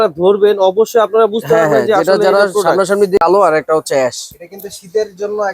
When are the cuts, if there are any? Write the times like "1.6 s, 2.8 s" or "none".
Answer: 3.2 s